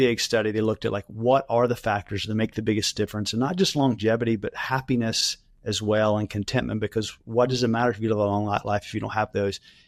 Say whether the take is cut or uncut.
uncut